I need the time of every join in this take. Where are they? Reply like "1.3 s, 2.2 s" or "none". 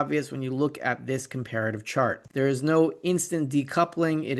2.2 s